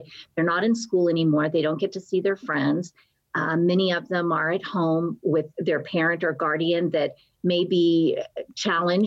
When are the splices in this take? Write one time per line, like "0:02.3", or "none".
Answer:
0:05.5